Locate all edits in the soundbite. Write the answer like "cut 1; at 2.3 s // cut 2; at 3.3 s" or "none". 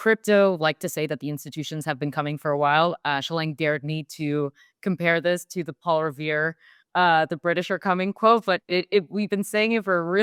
none